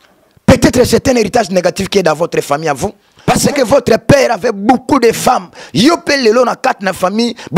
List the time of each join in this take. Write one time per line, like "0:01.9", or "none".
0:03.1